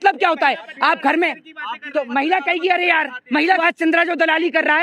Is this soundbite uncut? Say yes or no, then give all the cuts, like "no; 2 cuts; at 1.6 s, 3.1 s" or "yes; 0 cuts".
no; 1 cut; at 3.6 s